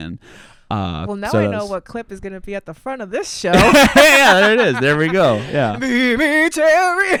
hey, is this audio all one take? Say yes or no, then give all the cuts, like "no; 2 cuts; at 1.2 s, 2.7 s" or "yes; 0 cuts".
yes; 0 cuts